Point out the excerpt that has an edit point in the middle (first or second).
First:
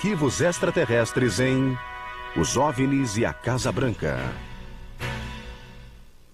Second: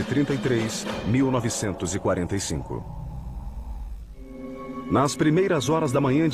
first